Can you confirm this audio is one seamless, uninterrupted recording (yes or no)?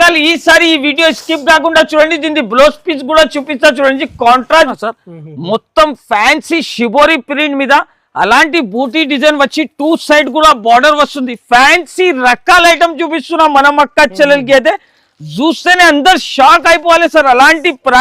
no